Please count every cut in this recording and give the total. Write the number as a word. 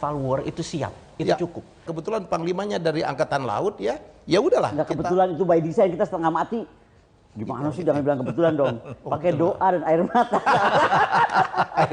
one